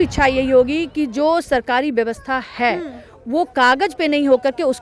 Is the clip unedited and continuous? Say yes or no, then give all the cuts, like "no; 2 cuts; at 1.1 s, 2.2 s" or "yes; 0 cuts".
yes; 0 cuts